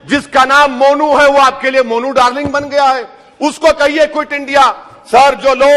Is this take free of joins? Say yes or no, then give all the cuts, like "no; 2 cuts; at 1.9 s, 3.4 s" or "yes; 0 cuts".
yes; 0 cuts